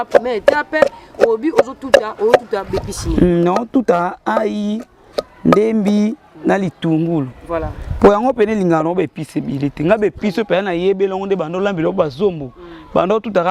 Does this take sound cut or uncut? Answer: uncut